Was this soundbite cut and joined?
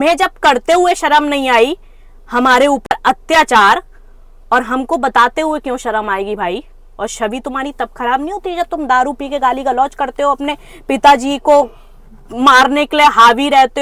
no; 0 cuts

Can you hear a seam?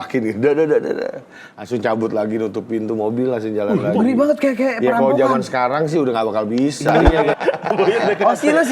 yes; 1 cut; at 7.3 s

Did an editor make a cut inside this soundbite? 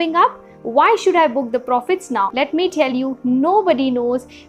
yes; 1 cut; at 2.3 s

